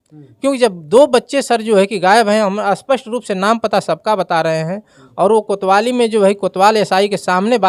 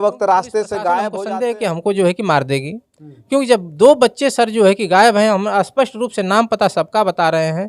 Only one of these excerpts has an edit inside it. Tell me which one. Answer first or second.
second